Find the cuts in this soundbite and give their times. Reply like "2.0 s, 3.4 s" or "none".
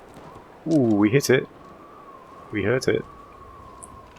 3.0 s